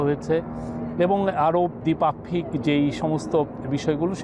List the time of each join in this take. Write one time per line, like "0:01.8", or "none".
0:01.8